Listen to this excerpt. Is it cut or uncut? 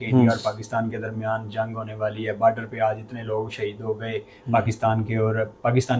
uncut